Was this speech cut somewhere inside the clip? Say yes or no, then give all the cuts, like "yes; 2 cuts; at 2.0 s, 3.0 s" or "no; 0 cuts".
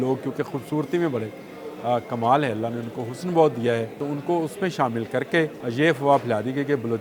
yes; 2 cuts; at 4.0 s, 5.6 s